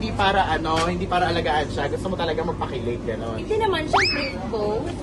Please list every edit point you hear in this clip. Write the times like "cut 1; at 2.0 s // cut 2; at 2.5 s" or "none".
none

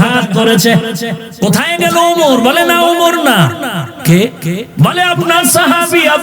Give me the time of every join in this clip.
cut 1; at 1.2 s

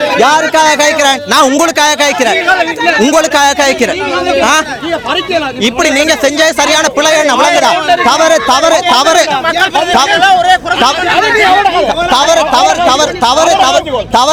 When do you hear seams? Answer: none

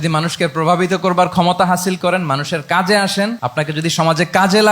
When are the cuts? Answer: cut 1; at 3.4 s

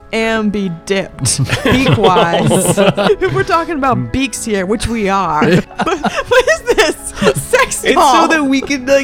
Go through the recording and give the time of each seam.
cut 1; at 3.1 s // cut 2; at 5.6 s

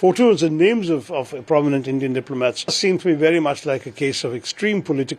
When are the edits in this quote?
cut 1; at 2.8 s

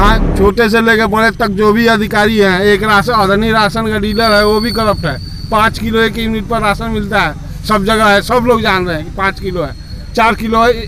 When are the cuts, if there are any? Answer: none

